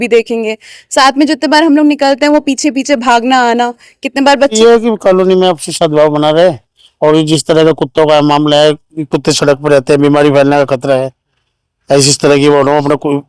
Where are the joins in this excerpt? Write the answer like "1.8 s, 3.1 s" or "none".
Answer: 4.6 s